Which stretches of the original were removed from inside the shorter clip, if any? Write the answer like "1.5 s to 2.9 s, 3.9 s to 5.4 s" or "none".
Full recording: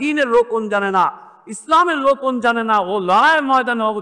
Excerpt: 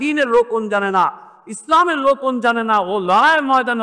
none